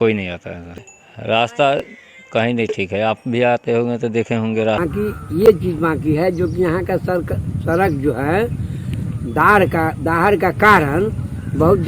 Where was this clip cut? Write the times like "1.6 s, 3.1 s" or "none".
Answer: 0.8 s, 4.8 s